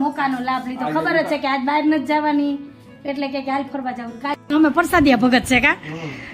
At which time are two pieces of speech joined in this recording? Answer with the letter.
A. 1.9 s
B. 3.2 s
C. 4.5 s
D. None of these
C